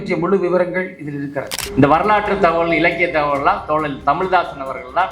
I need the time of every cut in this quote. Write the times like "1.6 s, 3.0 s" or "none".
1.6 s